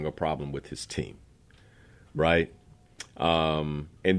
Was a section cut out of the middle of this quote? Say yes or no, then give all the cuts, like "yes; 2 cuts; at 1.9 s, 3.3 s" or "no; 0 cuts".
no; 0 cuts